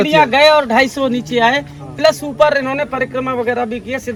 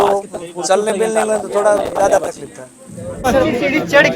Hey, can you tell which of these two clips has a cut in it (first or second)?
second